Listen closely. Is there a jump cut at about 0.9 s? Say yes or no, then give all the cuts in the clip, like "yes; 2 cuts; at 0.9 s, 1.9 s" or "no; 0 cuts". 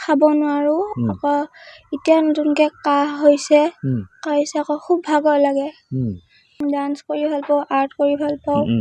no; 1 cut; at 6.6 s